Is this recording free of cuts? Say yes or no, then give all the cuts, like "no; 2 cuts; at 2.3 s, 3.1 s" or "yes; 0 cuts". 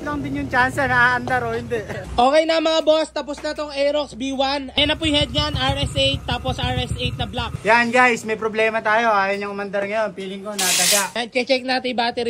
no; 4 cuts; at 2.0 s, 4.8 s, 7.5 s, 11.2 s